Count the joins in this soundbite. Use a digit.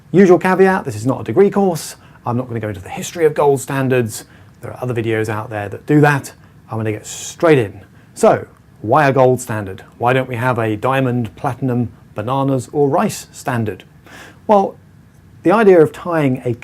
1